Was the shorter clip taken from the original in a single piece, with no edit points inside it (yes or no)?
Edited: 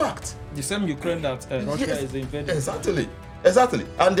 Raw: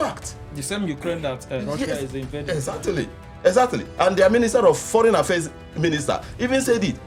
yes